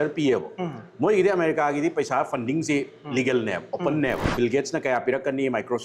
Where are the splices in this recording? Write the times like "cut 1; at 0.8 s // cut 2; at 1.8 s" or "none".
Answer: cut 1; at 4.2 s

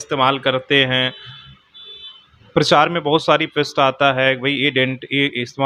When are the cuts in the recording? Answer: none

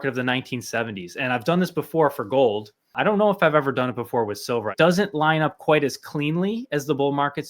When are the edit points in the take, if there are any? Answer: cut 1; at 2.9 s // cut 2; at 4.7 s

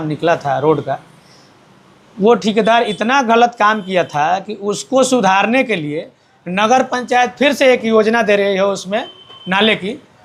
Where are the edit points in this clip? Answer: none

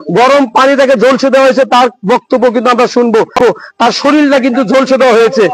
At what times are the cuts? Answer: none

